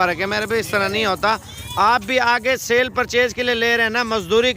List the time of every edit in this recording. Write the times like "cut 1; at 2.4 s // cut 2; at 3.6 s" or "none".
none